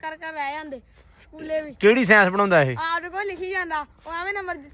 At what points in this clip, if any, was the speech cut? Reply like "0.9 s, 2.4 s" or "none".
none